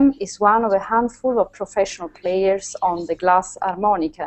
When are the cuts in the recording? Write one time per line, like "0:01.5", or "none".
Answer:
0:02.1